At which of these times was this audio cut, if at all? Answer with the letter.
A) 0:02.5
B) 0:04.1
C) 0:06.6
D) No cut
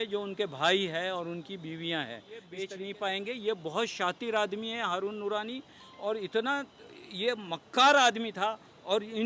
A